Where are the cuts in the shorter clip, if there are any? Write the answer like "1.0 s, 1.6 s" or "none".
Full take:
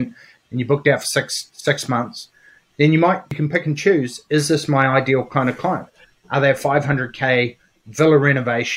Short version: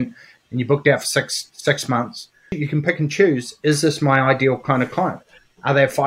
2.6 s

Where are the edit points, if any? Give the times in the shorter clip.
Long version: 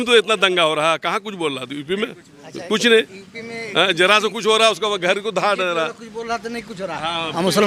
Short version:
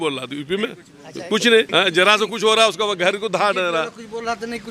1.7 s

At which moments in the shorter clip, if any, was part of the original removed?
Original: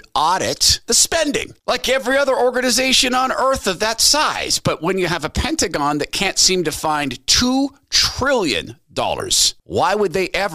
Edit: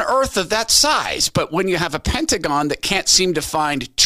none

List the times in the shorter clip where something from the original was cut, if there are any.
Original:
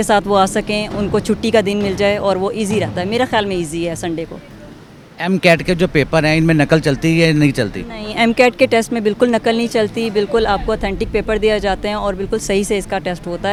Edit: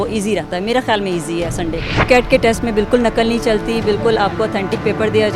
2.1 s

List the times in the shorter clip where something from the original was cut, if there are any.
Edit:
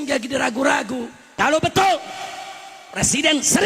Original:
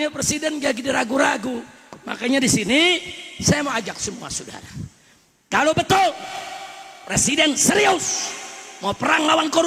1.2 s

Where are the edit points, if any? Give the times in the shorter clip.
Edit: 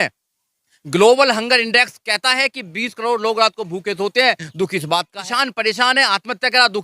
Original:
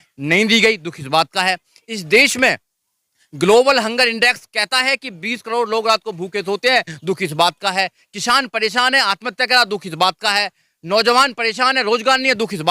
5.1 s

